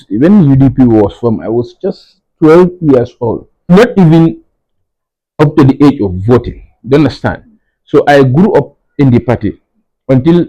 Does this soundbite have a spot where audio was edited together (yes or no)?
yes